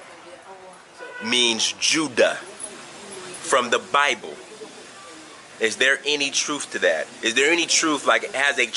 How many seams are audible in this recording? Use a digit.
0